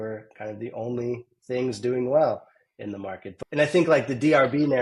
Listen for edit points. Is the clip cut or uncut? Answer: cut